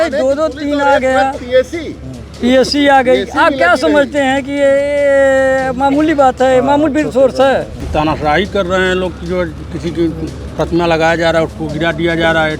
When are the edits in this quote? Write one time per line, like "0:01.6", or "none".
0:07.8